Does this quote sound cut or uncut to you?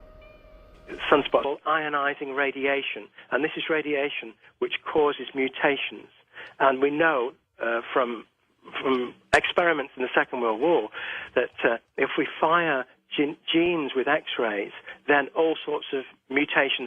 uncut